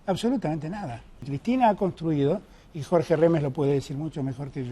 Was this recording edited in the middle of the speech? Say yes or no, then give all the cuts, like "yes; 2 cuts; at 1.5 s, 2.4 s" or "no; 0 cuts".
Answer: yes; 1 cut; at 1.3 s